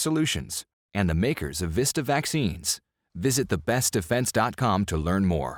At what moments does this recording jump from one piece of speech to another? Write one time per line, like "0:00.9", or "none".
none